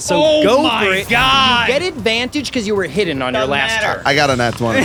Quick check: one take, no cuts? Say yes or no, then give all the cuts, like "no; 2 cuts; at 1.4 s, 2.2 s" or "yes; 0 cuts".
yes; 0 cuts